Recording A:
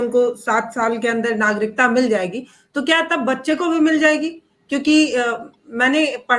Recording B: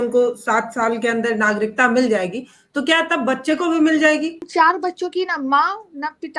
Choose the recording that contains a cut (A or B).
B